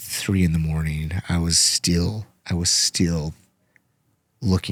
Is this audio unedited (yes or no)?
yes